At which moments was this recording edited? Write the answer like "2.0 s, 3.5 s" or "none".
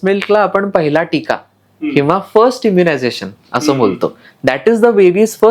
none